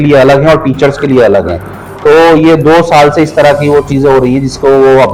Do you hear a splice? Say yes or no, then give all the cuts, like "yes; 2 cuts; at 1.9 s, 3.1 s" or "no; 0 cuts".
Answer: no; 0 cuts